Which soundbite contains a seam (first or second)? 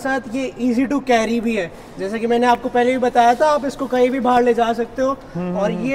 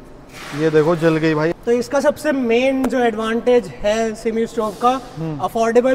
second